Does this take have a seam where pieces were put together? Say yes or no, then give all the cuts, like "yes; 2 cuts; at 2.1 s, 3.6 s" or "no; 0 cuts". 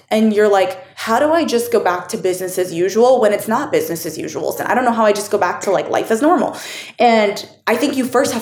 yes; 1 cut; at 4.6 s